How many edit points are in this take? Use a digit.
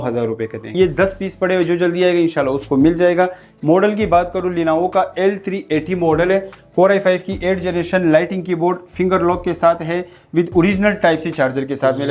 2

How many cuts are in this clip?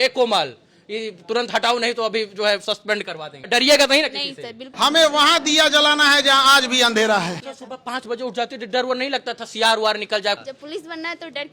4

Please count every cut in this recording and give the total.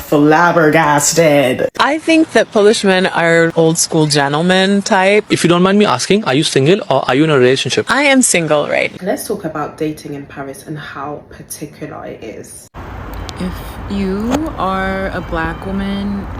3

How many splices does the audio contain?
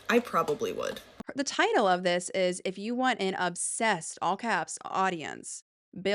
1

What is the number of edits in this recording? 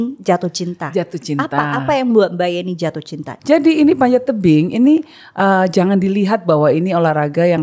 1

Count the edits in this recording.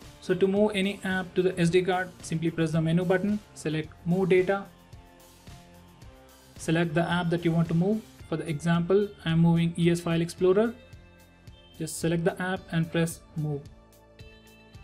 1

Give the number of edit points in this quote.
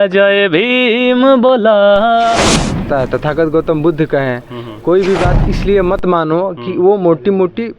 1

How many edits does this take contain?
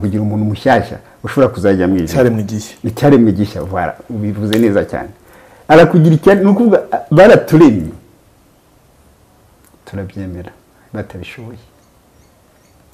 0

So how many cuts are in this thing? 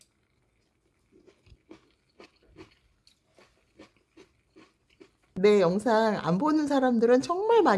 1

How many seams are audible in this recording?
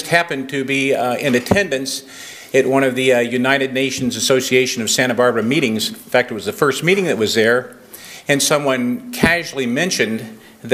1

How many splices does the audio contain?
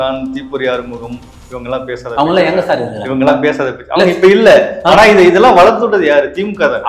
0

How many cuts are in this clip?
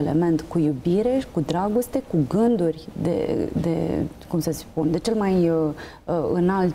0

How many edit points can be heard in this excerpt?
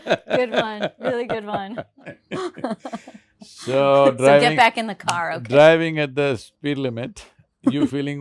1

